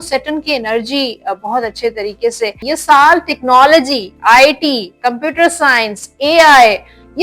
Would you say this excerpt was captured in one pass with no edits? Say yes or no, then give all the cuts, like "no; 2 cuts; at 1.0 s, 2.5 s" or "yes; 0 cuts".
no; 1 cut; at 2.6 s